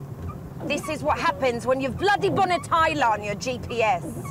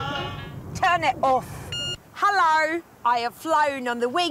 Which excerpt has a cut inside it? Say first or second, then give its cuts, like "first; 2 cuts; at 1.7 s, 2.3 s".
first; 1 cut; at 2.5 s